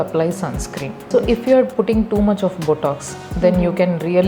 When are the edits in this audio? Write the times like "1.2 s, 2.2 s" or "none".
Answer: 1.0 s